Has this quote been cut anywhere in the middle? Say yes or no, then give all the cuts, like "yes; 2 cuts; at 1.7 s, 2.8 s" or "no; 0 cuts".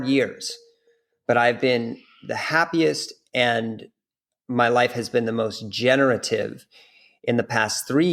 no; 0 cuts